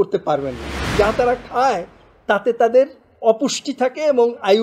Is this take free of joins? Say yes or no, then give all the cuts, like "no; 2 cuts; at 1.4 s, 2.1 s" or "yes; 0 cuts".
no; 1 cut; at 0.9 s